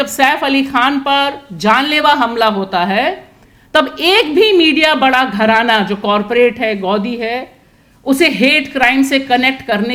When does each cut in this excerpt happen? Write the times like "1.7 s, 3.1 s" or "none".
none

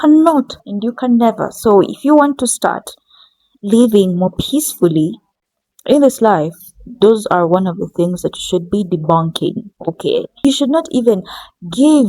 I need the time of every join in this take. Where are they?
10.4 s

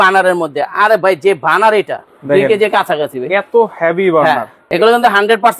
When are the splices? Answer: 2.1 s, 4.6 s

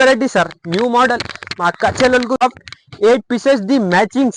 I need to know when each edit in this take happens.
2.4 s

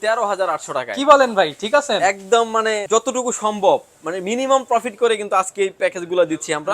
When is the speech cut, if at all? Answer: 2.8 s

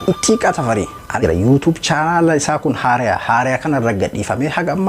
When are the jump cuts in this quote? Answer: 1.2 s

